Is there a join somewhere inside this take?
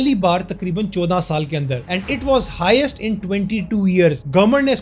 no; 0 cuts

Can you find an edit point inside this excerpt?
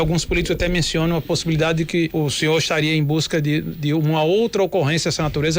no; 0 cuts

